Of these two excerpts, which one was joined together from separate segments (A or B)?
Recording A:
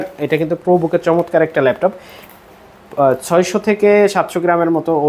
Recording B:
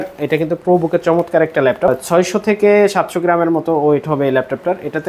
B